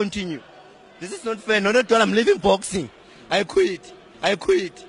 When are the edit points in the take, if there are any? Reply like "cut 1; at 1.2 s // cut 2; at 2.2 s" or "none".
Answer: none